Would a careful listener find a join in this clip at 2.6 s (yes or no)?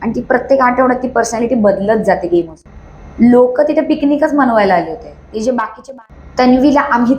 yes